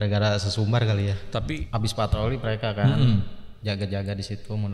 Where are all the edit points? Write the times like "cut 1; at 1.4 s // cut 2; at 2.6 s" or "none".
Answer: cut 1; at 1.6 s